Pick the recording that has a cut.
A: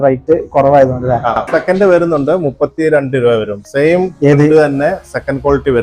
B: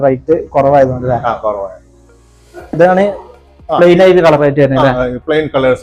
A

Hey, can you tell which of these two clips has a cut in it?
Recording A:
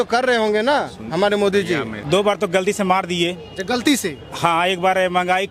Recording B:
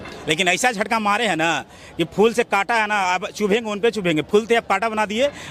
A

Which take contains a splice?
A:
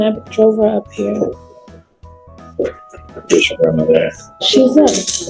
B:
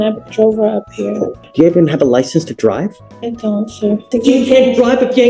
B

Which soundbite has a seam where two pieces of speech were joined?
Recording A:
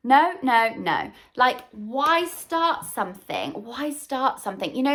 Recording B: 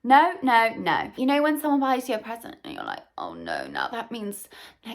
B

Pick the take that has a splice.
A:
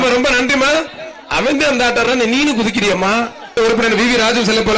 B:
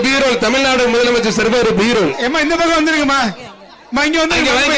A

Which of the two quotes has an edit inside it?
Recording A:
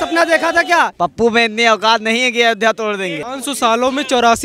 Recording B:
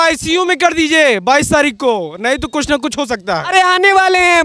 A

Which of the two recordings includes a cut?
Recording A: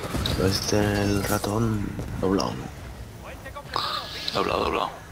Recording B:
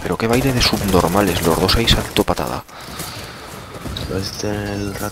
B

